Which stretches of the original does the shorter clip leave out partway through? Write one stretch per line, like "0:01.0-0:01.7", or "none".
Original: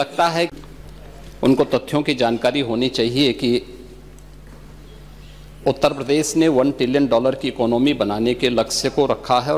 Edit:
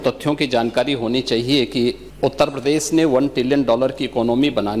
0:03.7-0:05.5